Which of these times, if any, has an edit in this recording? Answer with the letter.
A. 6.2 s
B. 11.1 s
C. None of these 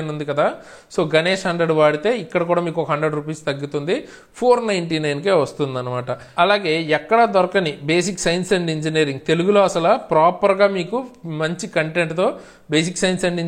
A